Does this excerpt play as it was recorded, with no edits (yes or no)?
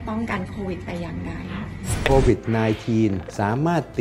no